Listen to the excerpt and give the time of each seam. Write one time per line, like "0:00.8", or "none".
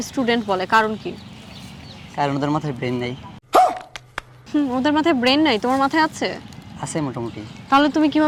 none